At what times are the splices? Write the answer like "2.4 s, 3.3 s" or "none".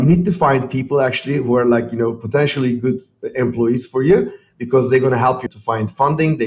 5.5 s